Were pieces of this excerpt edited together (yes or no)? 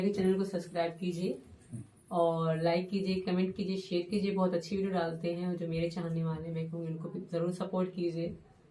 no